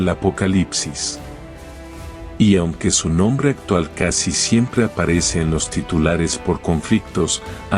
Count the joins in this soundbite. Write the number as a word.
zero